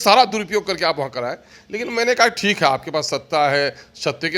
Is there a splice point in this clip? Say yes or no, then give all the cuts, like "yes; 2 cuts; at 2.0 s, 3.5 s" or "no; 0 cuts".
no; 0 cuts